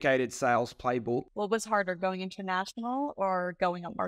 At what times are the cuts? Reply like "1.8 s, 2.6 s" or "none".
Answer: 1.3 s